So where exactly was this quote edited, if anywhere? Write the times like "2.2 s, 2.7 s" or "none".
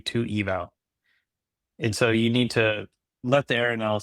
3.1 s